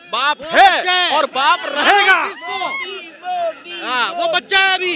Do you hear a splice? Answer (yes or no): no